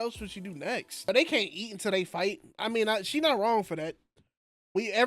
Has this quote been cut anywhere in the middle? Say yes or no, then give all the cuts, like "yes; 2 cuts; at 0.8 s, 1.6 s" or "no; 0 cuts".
yes; 1 cut; at 1.1 s